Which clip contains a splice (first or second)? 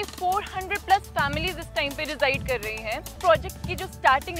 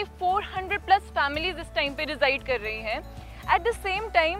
first